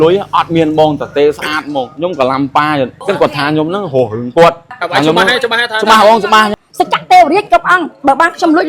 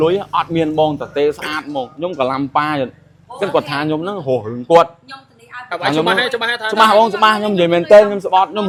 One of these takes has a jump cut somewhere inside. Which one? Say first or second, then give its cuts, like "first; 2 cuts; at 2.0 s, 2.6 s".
first; 3 cuts; at 3.0 s, 4.7 s, 6.5 s